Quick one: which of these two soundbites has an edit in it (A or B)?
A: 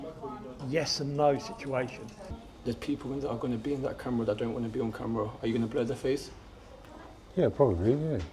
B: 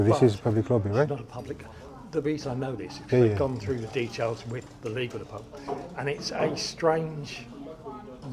A